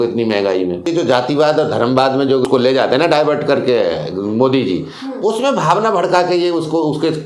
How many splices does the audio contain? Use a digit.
2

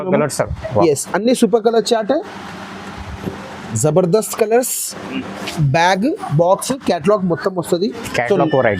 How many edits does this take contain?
1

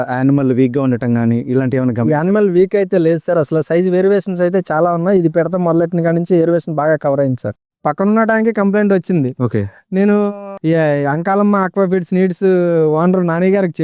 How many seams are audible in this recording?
1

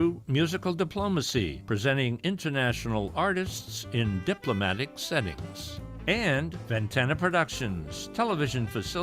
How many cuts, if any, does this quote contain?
2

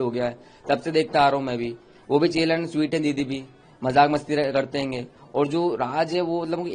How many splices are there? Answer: 0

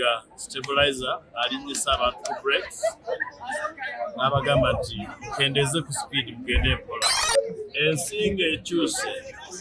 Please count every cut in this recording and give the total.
1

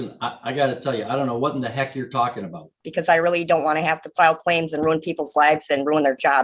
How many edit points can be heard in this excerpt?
1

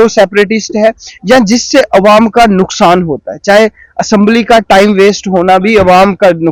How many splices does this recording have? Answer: 0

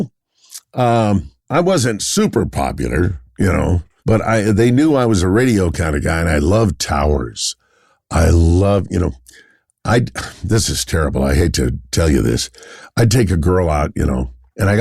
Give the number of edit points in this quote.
1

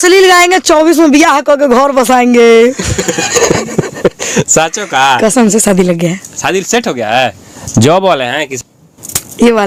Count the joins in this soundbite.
0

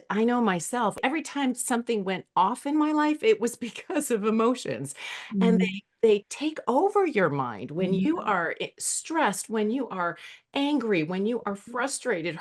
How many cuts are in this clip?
1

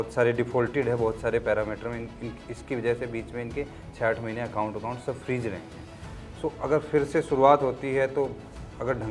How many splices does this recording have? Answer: 0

